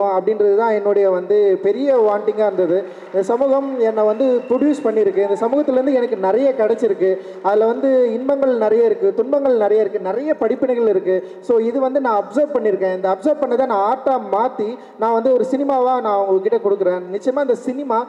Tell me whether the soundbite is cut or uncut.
uncut